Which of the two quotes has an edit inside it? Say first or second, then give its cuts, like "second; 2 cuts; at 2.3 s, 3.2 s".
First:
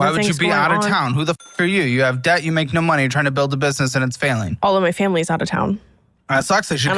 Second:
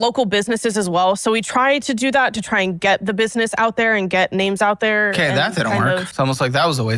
second; 1 cut; at 6.1 s